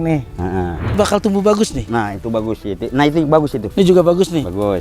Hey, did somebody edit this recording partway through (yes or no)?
yes